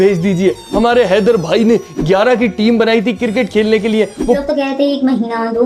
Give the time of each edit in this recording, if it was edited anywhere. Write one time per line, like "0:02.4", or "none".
0:04.4